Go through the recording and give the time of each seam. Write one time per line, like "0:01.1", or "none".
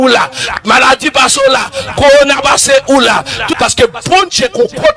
0:03.5